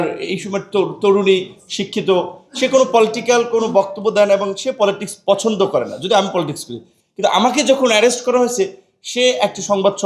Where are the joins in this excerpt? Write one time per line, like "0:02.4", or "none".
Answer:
none